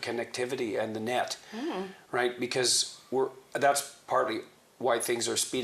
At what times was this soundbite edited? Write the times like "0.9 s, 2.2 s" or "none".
none